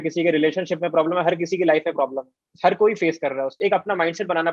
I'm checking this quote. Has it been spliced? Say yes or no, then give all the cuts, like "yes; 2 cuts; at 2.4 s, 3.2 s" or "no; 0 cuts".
yes; 2 cuts; at 2.5 s, 3.6 s